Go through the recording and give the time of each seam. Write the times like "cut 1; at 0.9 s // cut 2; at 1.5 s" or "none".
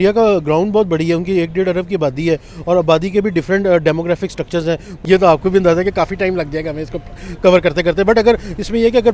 cut 1; at 4.9 s